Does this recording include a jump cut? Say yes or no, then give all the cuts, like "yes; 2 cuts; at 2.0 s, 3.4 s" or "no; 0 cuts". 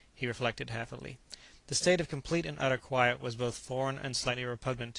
yes; 1 cut; at 2.4 s